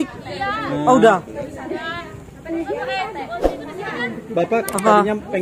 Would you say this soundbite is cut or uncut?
uncut